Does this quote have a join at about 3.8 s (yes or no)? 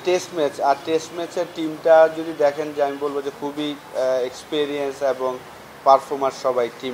yes